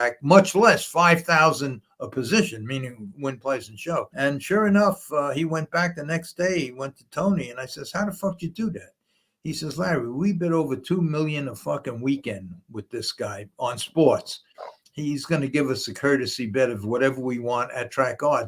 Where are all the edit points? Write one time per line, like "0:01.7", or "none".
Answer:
0:04.1